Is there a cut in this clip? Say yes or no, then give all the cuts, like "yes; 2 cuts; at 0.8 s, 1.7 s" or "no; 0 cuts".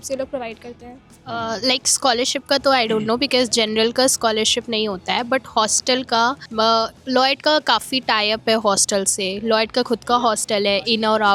no; 0 cuts